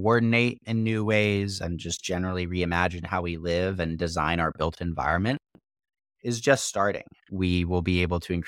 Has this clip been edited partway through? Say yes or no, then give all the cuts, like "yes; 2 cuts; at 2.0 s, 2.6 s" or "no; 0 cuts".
yes; 1 cut; at 7.1 s